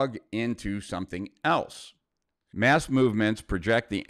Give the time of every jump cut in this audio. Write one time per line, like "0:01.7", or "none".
0:02.4